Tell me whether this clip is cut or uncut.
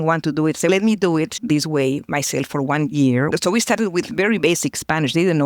cut